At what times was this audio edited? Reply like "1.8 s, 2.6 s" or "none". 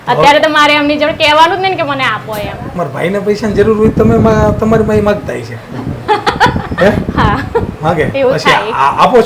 2.7 s